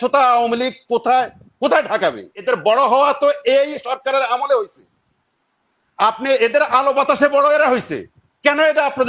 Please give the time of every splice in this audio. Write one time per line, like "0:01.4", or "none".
0:02.4